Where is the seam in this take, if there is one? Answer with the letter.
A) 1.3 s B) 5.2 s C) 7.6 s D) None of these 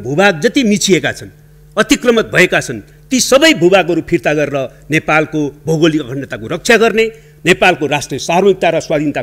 D